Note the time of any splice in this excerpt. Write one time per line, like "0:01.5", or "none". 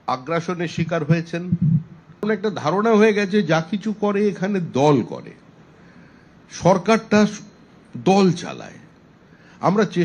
0:02.2